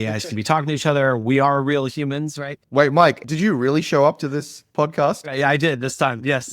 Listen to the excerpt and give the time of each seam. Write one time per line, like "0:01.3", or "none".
0:03.2
0:05.3